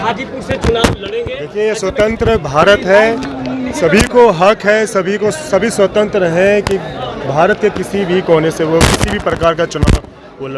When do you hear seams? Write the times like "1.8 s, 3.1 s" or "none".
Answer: none